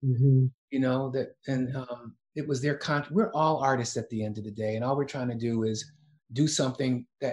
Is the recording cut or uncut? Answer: cut